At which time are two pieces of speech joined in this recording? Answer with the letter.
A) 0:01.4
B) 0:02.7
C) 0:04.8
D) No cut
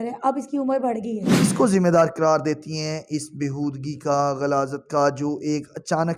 A